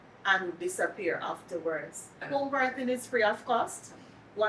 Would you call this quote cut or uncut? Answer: cut